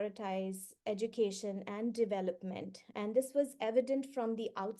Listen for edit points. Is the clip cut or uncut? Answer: uncut